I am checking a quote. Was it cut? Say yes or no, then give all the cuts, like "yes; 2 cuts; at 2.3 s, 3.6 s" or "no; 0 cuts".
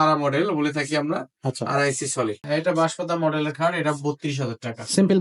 yes; 1 cut; at 2.4 s